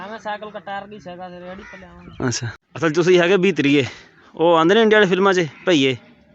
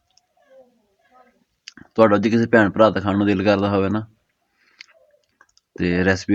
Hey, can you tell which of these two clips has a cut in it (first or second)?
first